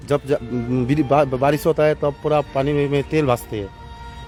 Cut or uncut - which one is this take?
uncut